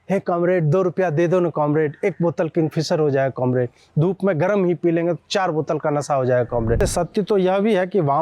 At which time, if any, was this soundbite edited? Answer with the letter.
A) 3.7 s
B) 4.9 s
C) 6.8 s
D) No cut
C